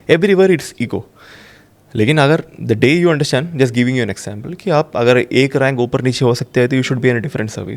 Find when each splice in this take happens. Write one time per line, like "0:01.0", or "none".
none